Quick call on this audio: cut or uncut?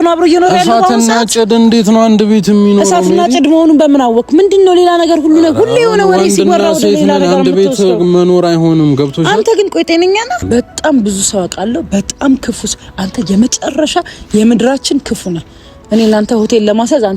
cut